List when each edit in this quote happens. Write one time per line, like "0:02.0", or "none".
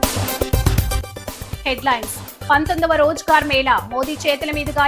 0:01.5